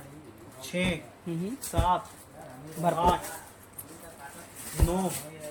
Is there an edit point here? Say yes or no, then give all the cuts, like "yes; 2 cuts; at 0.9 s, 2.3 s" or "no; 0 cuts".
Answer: no; 0 cuts